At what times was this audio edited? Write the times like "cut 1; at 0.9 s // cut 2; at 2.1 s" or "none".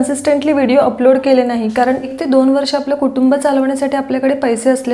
cut 1; at 2.2 s